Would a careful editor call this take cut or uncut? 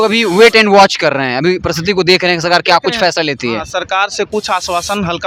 uncut